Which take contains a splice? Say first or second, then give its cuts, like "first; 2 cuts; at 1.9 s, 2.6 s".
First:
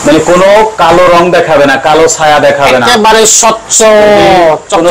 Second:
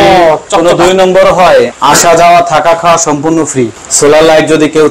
second; 2 cuts; at 1.8 s, 3.8 s